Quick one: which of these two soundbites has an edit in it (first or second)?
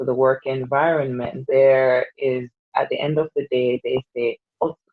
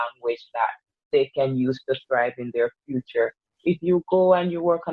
first